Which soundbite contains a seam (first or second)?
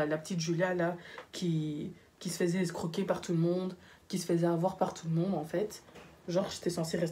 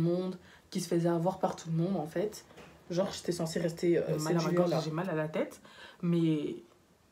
second